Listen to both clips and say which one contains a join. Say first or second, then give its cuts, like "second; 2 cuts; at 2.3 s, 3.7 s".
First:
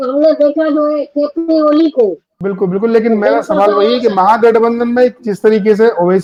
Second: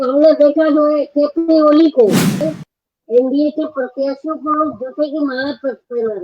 second; 1 cut; at 2.4 s